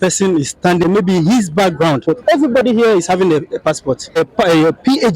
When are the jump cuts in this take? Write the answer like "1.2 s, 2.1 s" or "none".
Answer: 0.8 s, 2.0 s, 4.2 s